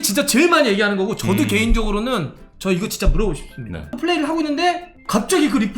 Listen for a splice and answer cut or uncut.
cut